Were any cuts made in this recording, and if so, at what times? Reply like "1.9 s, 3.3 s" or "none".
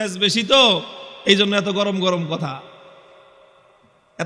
none